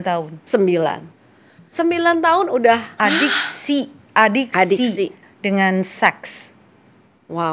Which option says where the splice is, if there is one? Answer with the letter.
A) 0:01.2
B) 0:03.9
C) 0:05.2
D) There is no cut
C